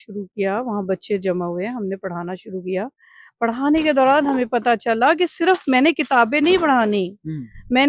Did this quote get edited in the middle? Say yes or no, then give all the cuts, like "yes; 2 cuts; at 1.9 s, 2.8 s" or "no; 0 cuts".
no; 0 cuts